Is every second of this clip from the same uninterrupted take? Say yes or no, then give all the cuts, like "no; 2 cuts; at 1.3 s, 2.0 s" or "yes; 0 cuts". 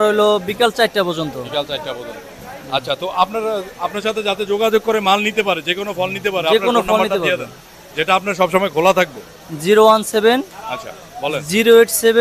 yes; 0 cuts